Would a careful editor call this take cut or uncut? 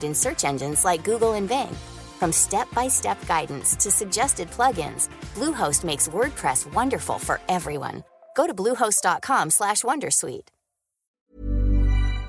cut